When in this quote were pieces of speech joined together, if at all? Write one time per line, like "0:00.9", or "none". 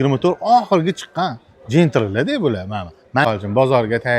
0:03.2